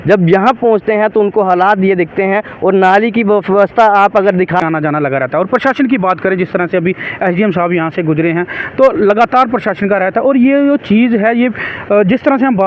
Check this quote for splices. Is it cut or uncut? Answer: cut